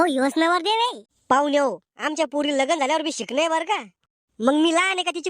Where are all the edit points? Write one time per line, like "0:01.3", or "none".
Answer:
0:01.1